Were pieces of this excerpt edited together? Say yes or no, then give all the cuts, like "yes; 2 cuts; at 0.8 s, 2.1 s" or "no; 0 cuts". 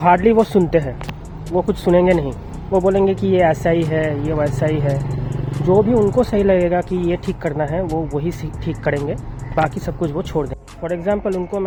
no; 0 cuts